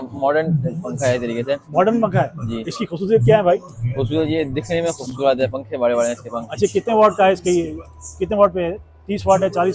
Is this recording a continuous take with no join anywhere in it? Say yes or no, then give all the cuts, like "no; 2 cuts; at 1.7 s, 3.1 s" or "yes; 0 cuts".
yes; 0 cuts